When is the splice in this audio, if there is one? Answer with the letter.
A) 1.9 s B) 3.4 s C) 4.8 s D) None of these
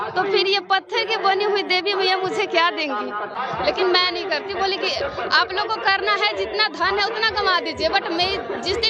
B